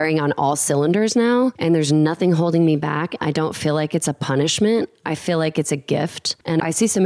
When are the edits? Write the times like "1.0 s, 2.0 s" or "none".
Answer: none